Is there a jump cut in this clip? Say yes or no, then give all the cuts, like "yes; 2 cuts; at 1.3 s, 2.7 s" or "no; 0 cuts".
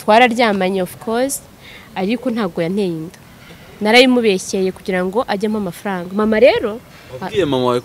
no; 0 cuts